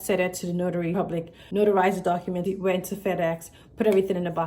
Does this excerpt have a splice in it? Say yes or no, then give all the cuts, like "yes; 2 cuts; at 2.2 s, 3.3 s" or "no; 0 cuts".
yes; 2 cuts; at 1.0 s, 2.5 s